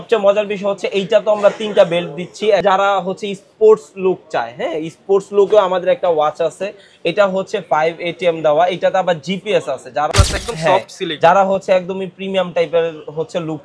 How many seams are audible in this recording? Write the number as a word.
two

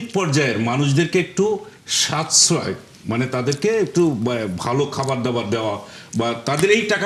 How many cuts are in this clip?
zero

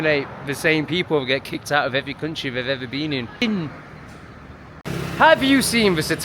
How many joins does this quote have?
two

